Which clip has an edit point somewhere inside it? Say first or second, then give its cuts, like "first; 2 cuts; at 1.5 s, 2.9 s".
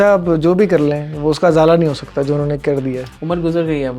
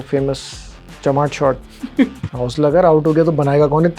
second; 1 cut; at 2.3 s